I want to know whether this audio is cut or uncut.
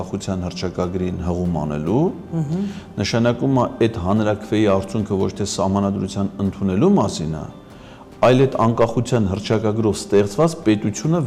uncut